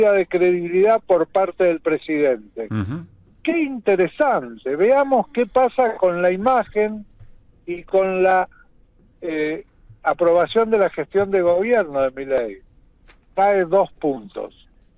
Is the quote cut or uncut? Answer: uncut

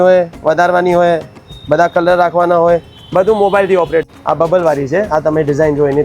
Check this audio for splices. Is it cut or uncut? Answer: cut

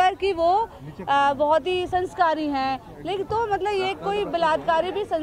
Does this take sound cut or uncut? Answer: uncut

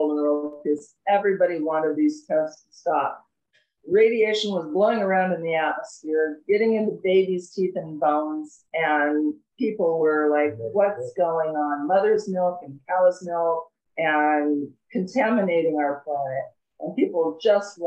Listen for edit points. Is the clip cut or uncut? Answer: uncut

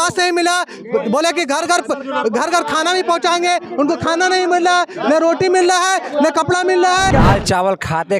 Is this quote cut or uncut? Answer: cut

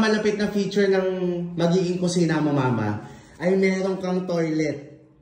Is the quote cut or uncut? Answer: uncut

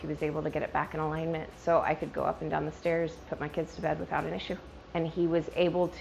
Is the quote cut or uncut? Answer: cut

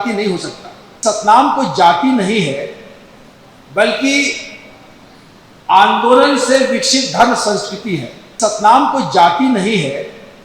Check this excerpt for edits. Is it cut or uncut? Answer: cut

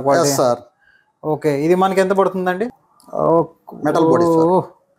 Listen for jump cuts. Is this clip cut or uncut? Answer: cut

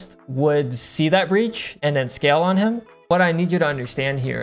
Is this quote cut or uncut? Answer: cut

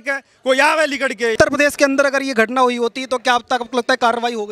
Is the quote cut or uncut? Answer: cut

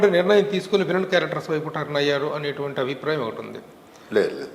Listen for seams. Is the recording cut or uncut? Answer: uncut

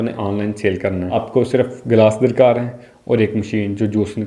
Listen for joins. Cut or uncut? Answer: cut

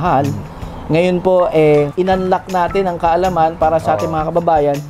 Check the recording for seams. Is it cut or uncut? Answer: cut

